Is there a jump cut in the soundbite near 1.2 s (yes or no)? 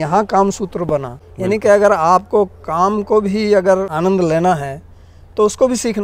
yes